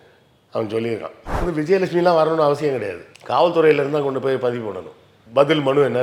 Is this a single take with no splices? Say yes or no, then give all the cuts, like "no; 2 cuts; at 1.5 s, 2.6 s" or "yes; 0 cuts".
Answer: no; 1 cut; at 1.5 s